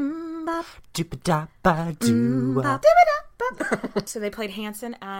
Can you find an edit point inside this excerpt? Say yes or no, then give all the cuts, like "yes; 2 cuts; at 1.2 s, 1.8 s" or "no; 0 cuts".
yes; 2 cuts; at 2.7 s, 3.6 s